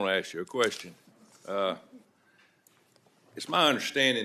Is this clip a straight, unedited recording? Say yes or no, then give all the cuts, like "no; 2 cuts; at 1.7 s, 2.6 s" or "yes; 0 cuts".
yes; 0 cuts